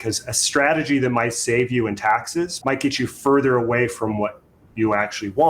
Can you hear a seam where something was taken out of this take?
yes; 1 cut; at 2.5 s

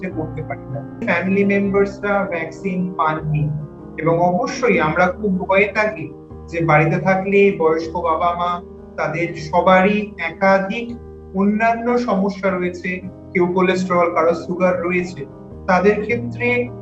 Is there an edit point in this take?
yes; 1 cut; at 1.0 s

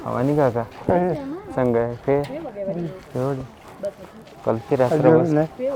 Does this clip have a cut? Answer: no; 0 cuts

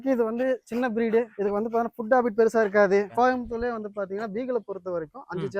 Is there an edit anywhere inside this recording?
yes; 2 cuts; at 1.3 s, 3.1 s

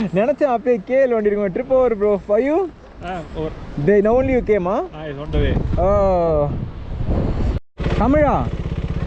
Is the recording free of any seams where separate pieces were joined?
no; 1 cut; at 7.6 s

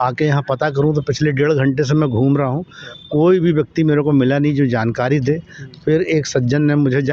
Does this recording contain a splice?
no; 0 cuts

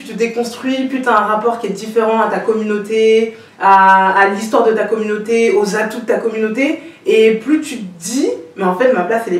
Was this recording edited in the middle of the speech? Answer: no; 0 cuts

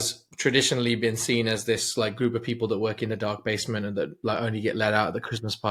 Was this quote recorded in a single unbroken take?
yes; 0 cuts

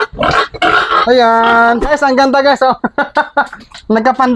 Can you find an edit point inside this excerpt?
yes; 1 cut; at 1.9 s

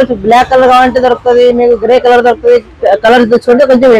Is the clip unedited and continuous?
yes; 0 cuts

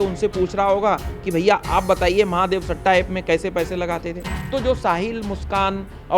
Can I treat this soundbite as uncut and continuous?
no; 1 cut; at 4.3 s

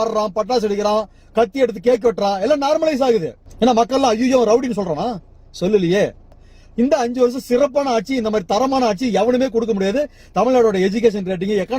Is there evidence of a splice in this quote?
no; 0 cuts

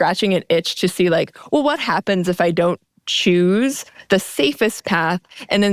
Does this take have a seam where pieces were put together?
no; 0 cuts

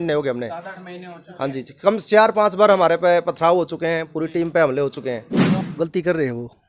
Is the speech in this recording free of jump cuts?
no; 1 cut; at 5.5 s

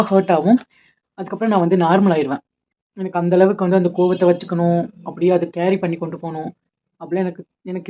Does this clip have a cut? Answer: no; 0 cuts

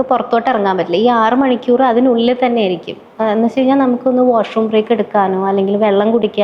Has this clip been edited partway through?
no; 0 cuts

